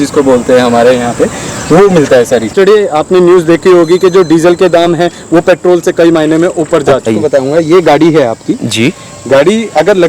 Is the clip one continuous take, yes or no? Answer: no